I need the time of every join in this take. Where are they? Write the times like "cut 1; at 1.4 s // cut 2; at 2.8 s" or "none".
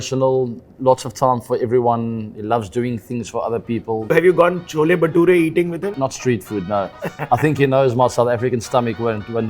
cut 1; at 4.1 s // cut 2; at 5.9 s